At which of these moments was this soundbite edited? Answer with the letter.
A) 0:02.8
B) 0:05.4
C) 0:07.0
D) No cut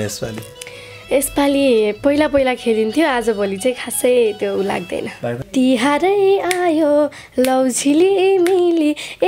B